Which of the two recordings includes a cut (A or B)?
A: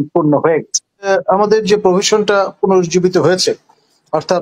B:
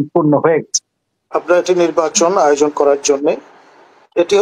A